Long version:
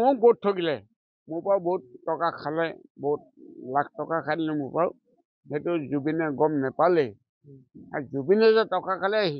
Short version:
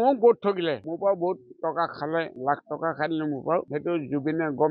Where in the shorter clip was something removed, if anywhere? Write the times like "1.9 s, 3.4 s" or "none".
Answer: 0.9 s, 2.3 s, 3.7 s